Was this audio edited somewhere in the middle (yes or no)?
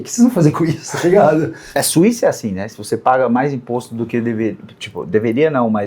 yes